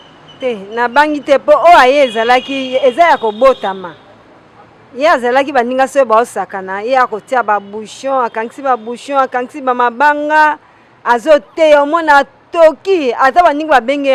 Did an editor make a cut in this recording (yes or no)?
no